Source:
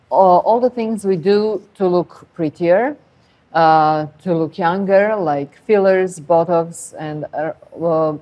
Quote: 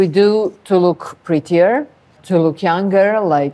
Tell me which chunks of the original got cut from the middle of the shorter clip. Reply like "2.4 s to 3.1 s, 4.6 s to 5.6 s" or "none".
3.3 s to 4.1 s